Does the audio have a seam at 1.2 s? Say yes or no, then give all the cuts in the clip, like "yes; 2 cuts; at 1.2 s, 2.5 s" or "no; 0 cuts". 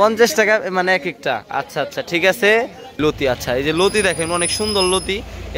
no; 1 cut; at 3.0 s